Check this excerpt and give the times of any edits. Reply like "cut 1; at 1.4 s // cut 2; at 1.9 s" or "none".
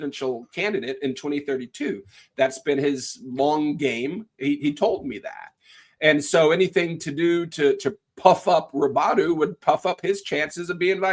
none